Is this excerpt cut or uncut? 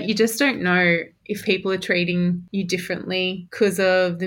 cut